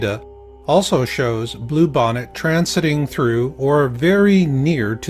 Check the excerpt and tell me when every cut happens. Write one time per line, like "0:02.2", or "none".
0:02.9